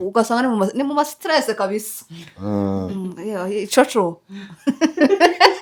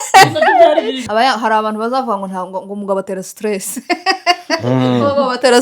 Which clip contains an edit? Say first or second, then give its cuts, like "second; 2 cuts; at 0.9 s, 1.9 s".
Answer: second; 1 cut; at 1.0 s